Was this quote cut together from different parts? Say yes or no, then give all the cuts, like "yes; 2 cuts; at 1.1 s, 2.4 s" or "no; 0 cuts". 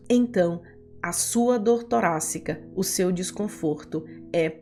no; 0 cuts